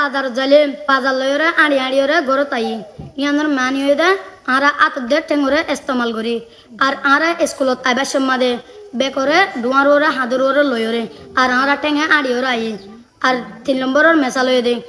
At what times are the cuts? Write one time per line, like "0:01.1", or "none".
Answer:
0:00.8
0:02.1